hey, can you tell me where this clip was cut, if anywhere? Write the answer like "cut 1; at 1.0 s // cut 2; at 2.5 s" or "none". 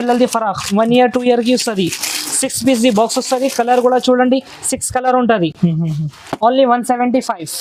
none

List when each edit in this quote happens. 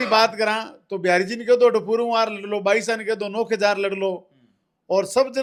none

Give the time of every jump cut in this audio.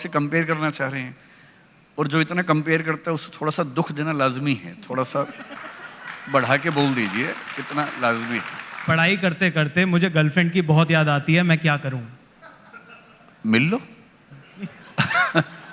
cut 1; at 8.9 s

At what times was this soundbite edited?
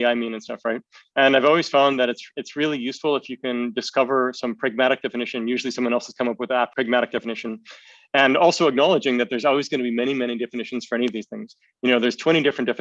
cut 1; at 6.7 s

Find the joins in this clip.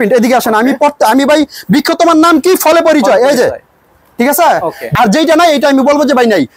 none

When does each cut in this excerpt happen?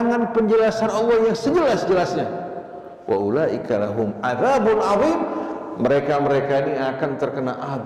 none

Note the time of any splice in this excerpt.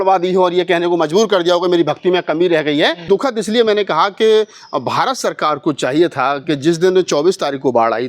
cut 1; at 3.0 s

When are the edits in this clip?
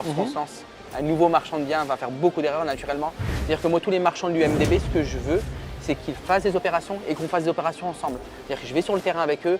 cut 1; at 3.3 s

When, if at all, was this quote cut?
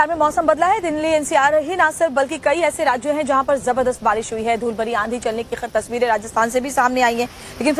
none

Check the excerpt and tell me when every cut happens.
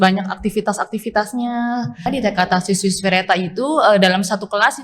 cut 1; at 2.1 s

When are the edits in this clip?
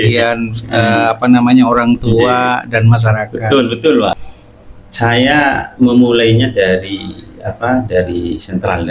cut 1; at 4.2 s

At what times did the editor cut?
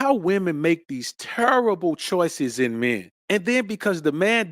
cut 1; at 3.1 s

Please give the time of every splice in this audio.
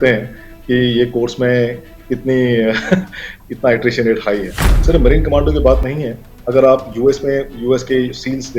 cut 1; at 4.8 s

